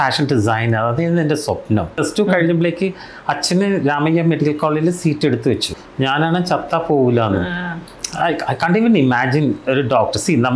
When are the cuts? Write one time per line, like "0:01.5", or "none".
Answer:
0:01.9
0:05.8